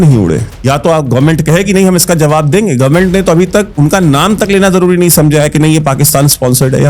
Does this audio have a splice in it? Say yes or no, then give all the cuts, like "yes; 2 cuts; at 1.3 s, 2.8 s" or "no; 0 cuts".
no; 0 cuts